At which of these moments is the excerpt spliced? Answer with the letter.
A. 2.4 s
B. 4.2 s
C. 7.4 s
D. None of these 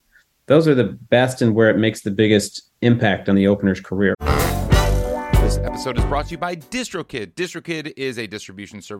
B